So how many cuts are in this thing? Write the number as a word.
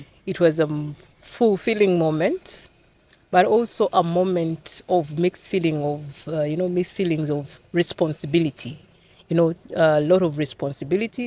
zero